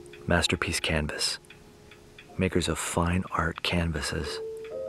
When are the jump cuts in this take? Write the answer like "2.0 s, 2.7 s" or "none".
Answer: none